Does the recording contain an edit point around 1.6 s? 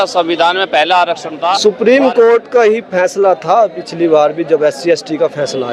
yes; 1 cut; at 1.6 s

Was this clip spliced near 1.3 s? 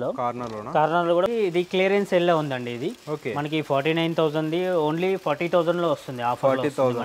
yes; 1 cut; at 1.3 s

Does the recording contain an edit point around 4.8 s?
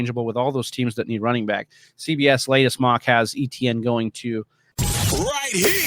yes; 1 cut; at 4.8 s

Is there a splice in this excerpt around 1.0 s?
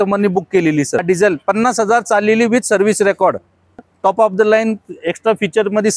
yes; 2 cuts; at 1.0 s, 3.9 s

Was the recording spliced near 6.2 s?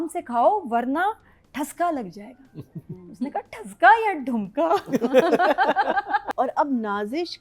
yes; 1 cut; at 6.2 s

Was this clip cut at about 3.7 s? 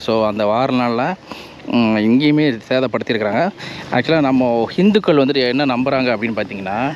yes; 1 cut; at 3.7 s

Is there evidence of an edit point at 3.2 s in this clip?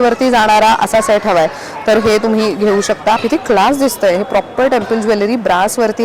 yes; 1 cut; at 3.2 s

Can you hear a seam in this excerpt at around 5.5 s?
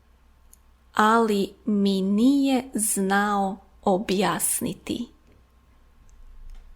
yes; 1 cut; at 5.5 s

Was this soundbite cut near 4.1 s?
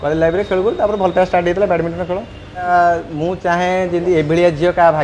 no; 1 cut; at 2.7 s

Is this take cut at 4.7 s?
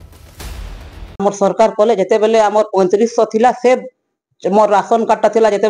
no; 1 cut; at 1.2 s

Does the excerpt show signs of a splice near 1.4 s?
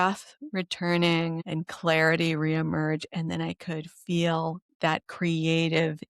yes; 1 cut; at 1.4 s

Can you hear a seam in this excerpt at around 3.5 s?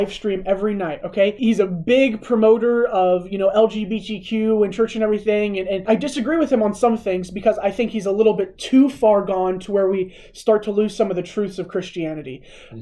no; 2 cuts; at 1.4 s, 5.8 s

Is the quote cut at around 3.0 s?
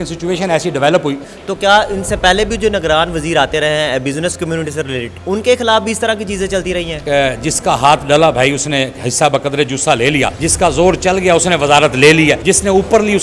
no; 5 cuts; at 1.3 s, 5.1 s, 7.0 s, 10.4 s, 12.4 s

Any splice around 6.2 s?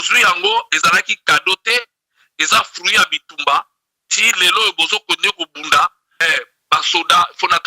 yes; 1 cut; at 6.2 s

